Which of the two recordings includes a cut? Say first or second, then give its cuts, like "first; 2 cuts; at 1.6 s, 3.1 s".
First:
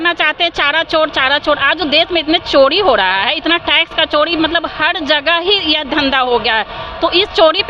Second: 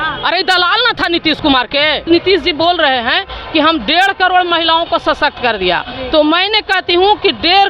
second; 1 cut; at 2.1 s